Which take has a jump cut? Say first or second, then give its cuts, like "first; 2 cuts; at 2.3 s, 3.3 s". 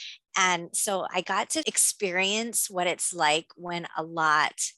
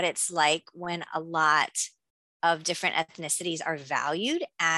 first; 1 cut; at 1.8 s